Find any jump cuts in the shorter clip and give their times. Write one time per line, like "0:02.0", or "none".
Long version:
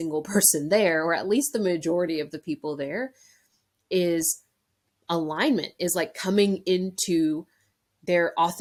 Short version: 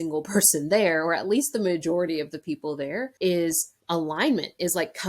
0:03.1
0:03.7